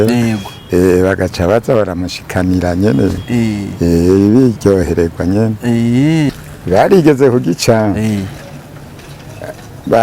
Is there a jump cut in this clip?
yes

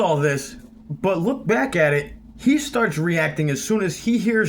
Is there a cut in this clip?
no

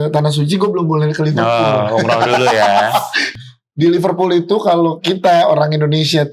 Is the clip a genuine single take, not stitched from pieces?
no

